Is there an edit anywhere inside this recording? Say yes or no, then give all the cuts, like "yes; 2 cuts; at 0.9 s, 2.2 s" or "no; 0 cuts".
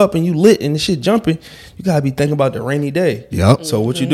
no; 0 cuts